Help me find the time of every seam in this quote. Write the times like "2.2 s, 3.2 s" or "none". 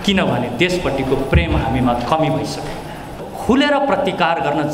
3.3 s